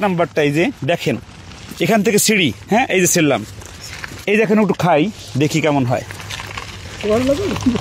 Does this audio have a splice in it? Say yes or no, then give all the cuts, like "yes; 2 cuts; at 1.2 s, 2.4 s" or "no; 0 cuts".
no; 0 cuts